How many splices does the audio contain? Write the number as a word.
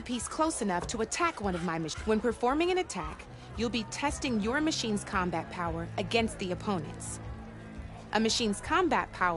two